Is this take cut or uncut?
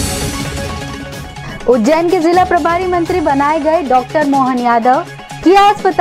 uncut